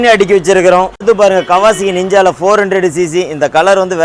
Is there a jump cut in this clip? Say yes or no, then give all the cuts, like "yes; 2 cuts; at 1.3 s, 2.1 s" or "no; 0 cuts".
yes; 1 cut; at 1.0 s